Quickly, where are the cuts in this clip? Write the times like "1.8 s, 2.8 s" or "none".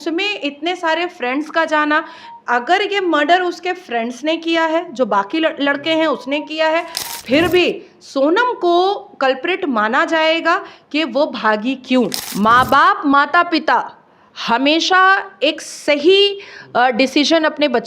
12.2 s